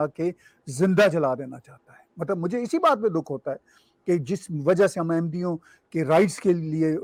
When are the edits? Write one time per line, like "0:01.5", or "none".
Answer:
none

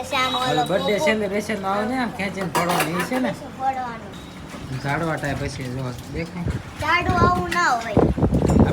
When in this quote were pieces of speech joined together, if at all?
0:04.1

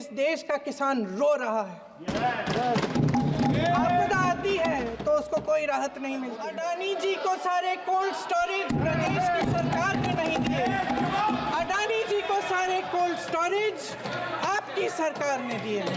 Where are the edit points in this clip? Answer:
0:06.4

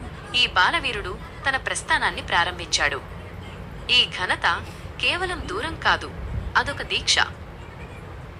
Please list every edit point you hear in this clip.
none

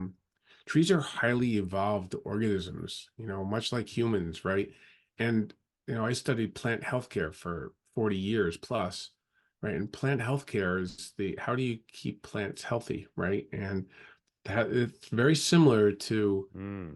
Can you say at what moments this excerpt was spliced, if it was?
none

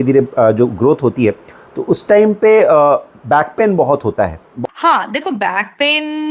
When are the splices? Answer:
0:04.4

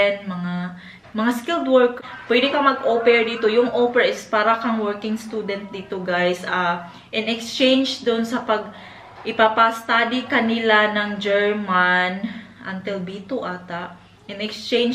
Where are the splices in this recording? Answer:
0:02.0

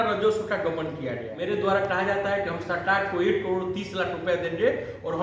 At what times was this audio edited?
0:01.3

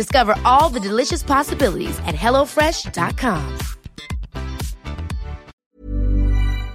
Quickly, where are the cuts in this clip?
0:05.5

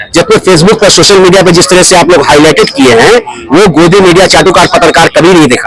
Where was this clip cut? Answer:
none

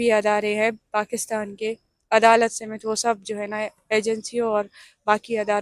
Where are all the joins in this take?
none

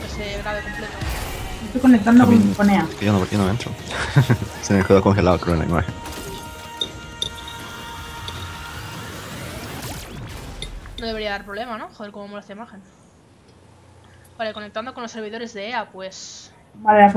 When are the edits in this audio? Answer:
none

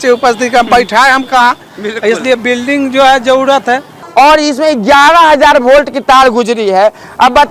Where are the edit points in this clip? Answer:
0:04.0

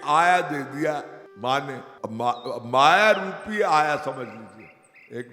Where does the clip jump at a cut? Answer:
0:01.2
0:01.9

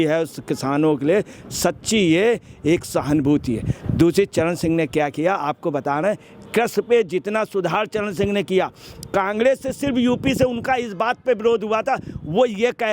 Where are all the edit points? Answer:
none

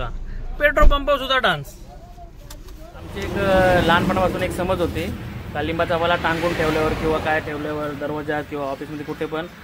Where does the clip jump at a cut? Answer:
0:02.9

